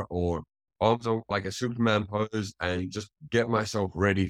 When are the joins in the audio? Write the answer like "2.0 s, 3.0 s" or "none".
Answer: none